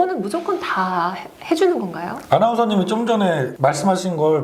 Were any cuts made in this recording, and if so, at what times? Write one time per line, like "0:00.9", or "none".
none